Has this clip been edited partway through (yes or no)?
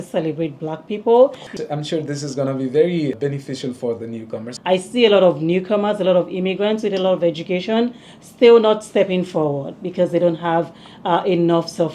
yes